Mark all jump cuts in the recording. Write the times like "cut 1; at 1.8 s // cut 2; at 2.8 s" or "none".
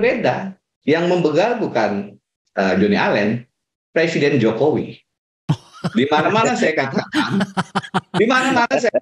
none